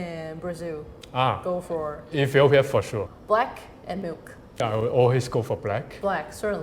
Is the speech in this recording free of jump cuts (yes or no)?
no